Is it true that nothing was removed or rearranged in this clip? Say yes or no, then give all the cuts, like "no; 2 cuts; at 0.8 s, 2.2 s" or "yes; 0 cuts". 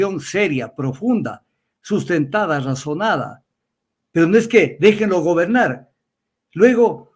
yes; 0 cuts